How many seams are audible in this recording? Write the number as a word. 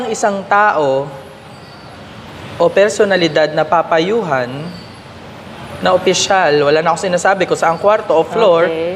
zero